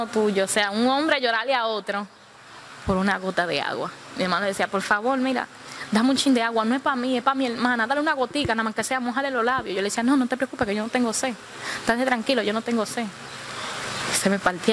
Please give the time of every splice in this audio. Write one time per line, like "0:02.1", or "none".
none